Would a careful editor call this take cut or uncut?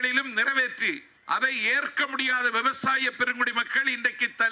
cut